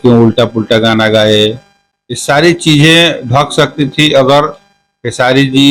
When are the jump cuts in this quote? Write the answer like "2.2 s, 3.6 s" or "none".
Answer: none